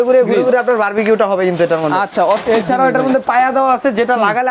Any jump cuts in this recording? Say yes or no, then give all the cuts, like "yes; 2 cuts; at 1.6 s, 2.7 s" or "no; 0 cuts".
no; 0 cuts